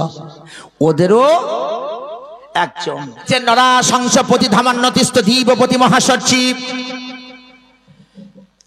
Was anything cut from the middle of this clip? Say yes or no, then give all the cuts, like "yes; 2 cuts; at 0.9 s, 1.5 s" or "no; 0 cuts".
yes; 1 cut; at 3.2 s